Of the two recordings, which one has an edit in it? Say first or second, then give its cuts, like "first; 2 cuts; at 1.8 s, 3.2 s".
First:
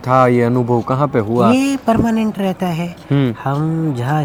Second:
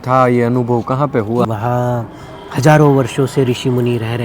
second; 1 cut; at 1.4 s